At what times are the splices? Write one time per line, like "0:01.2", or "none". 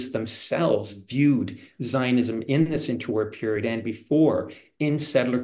none